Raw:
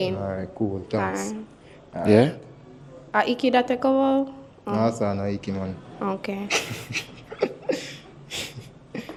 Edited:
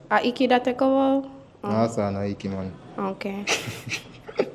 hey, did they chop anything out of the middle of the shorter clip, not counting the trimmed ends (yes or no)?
no